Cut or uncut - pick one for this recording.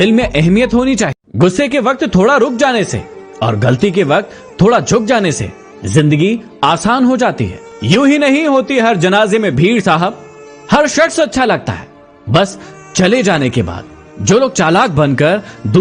cut